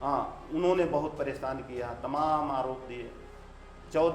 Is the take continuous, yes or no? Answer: yes